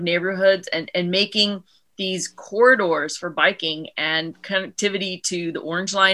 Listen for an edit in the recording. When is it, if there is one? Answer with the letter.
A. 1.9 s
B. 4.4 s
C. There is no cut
C